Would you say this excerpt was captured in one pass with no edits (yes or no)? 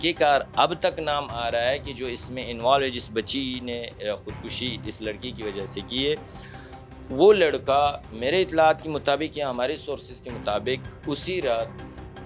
yes